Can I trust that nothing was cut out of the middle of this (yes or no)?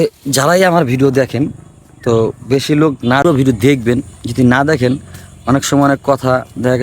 no